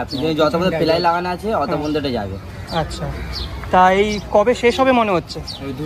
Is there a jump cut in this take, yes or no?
no